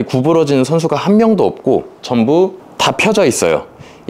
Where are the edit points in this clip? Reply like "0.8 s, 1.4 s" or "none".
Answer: 2.6 s